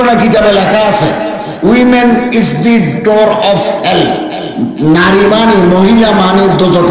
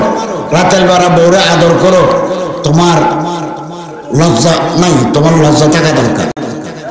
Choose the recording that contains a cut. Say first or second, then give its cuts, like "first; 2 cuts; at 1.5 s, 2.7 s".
first; 2 cuts; at 1.7 s, 4.4 s